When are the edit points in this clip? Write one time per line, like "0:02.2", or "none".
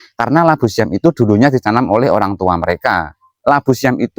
0:03.2